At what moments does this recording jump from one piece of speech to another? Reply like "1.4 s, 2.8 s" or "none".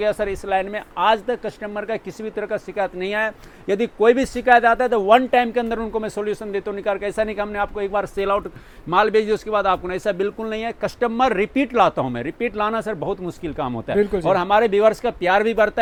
none